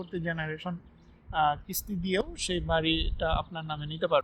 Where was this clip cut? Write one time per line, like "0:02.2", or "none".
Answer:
none